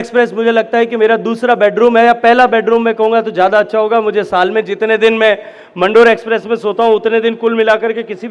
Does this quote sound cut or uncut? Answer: uncut